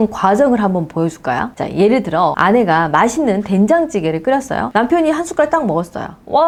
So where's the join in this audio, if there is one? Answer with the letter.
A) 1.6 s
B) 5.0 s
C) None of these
C